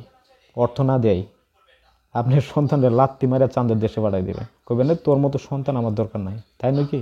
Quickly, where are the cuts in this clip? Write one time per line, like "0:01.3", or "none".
none

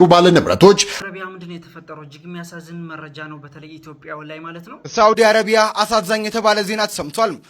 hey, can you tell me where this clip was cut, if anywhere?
0:00.9
0:04.7

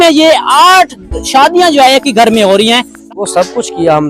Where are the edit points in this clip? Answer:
0:03.0

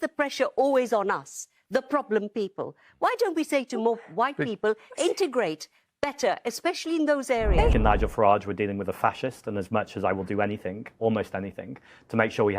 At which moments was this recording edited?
0:07.7

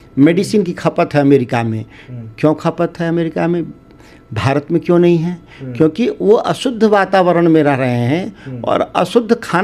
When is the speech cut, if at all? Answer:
none

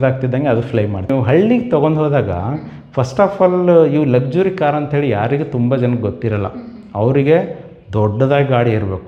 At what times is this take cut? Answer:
0:01.1

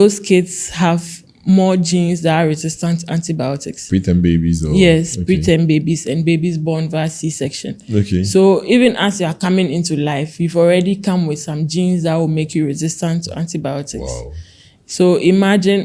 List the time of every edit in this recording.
none

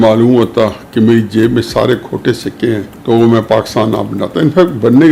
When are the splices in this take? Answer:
0:02.9

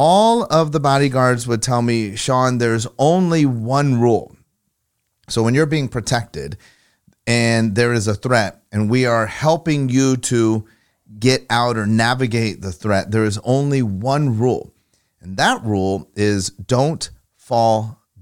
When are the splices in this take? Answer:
none

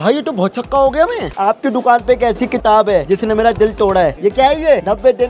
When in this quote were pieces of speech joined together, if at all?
0:01.3
0:04.2

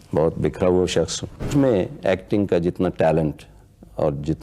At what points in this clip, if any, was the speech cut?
0:01.5

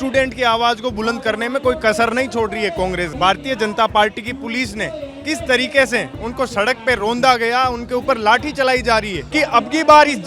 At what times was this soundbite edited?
0:03.1
0:09.2

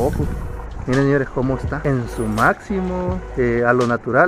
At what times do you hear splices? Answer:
0:01.7
0:03.2

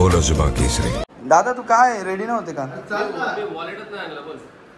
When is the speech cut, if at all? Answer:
0:01.0

